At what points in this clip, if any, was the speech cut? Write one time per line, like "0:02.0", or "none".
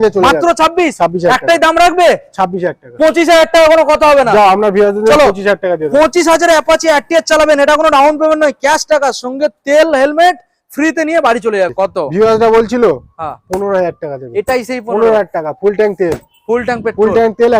0:11.7